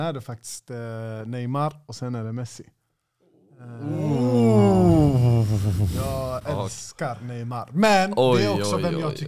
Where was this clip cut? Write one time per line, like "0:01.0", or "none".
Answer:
none